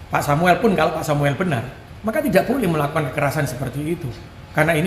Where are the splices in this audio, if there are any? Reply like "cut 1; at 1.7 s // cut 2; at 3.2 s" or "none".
none